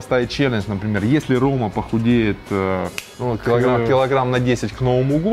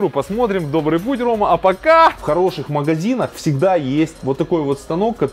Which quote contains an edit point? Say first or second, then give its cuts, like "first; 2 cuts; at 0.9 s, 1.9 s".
second; 2 cuts; at 2.2 s, 4.2 s